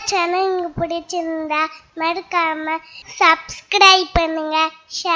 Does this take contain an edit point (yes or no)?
no